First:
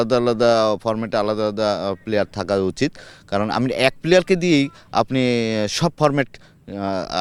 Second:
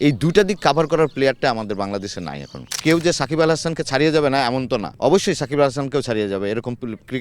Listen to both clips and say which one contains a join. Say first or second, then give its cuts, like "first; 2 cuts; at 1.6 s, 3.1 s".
second; 2 cuts; at 2.7 s, 4.9 s